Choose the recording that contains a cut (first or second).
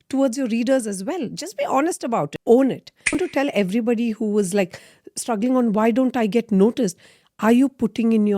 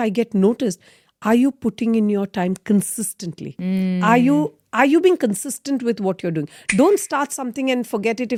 first